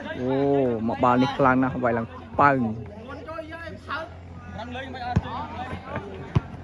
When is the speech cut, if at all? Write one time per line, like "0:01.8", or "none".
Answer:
none